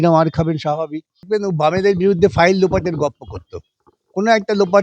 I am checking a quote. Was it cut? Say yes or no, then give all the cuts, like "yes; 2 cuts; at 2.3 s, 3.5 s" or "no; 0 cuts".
yes; 1 cut; at 1.3 s